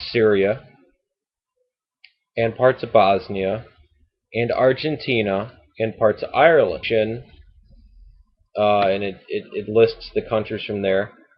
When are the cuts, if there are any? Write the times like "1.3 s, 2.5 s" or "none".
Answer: none